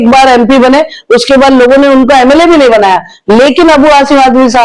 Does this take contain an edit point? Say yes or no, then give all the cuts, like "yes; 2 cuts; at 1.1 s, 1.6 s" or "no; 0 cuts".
no; 0 cuts